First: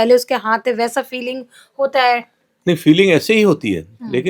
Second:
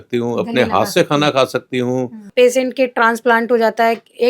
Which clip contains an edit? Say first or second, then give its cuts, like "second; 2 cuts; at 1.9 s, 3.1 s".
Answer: second; 1 cut; at 2.3 s